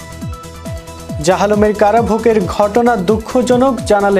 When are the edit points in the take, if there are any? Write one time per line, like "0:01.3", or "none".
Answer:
0:01.2